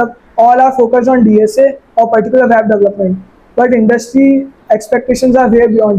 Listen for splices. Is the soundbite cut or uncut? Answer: uncut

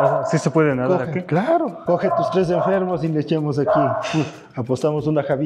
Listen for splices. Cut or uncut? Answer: cut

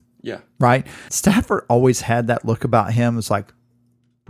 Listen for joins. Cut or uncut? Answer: cut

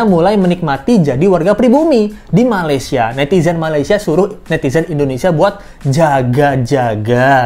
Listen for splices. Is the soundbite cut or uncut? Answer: uncut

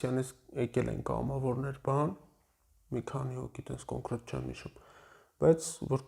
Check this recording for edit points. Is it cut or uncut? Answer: uncut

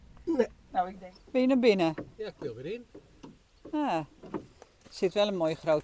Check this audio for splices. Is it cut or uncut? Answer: cut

